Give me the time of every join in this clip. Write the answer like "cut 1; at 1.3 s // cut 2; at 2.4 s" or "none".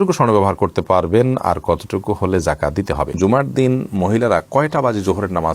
cut 1; at 3.2 s